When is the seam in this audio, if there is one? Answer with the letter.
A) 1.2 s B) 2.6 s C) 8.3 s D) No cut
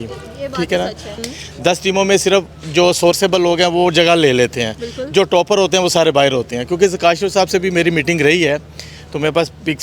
A